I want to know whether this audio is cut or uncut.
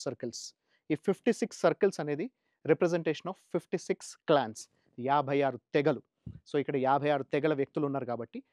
uncut